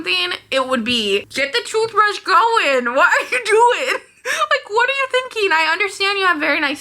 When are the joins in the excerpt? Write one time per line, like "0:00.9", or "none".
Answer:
0:01.3